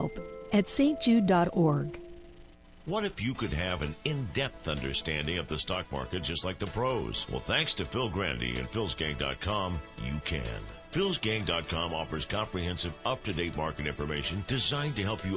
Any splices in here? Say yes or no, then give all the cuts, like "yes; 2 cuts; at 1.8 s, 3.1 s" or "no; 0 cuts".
yes; 1 cut; at 2.6 s